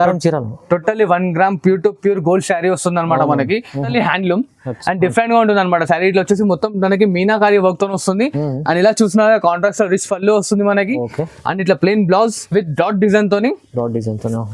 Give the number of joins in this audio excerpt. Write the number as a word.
one